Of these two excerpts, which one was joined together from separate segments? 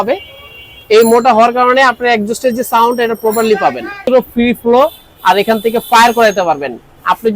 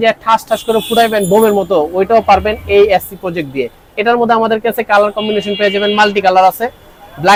first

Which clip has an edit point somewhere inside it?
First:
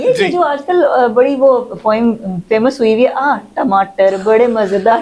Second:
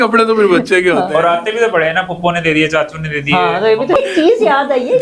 second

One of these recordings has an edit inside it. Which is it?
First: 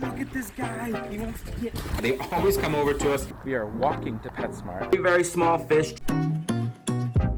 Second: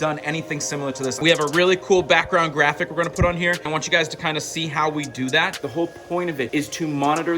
second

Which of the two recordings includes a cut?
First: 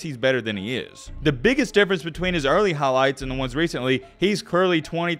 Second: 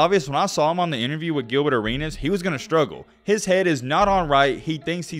first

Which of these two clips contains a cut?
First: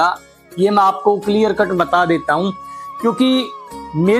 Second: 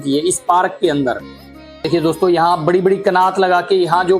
second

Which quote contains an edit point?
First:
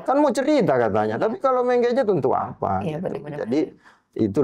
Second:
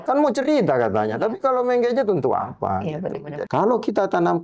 second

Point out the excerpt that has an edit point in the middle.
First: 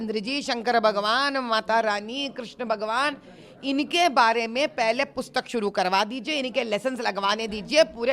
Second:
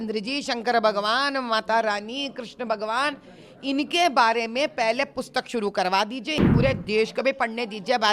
second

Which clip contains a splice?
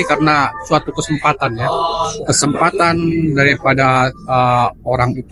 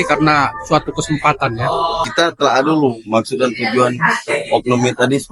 second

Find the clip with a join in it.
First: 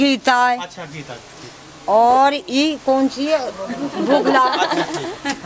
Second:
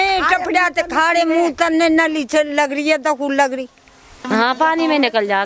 second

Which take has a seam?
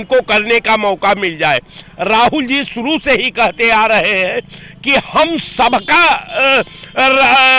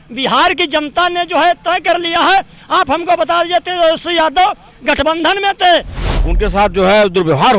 second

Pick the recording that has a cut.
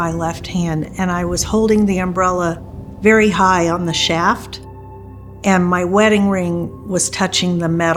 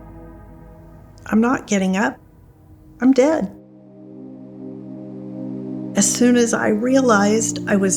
second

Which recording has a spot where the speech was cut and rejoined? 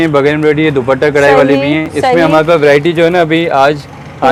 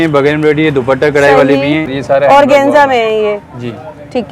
second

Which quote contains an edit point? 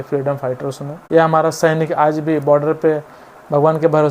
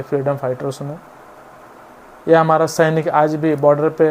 first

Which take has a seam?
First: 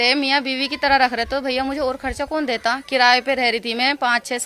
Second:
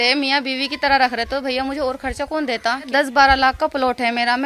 second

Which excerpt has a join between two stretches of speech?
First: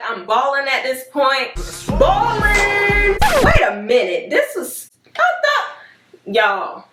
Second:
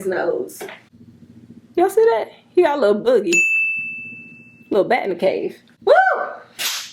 second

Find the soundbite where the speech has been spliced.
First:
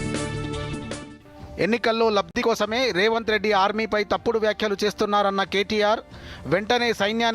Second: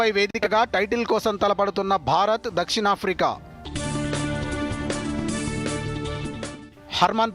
first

